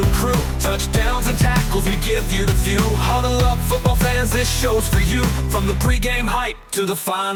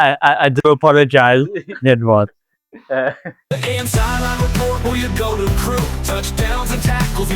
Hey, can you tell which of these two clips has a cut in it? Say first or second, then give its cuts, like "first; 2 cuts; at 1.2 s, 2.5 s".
second; 1 cut; at 3.7 s